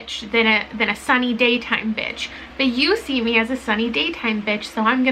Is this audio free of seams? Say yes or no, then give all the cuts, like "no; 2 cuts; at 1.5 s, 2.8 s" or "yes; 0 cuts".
yes; 0 cuts